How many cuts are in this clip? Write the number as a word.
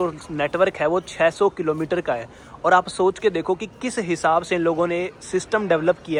zero